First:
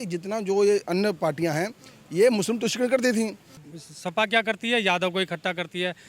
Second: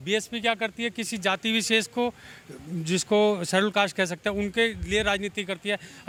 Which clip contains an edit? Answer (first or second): first